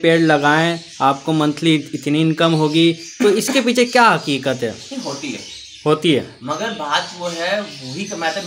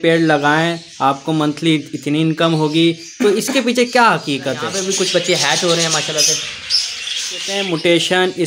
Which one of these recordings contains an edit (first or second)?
second